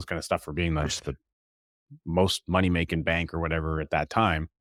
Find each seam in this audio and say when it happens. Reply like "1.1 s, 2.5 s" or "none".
none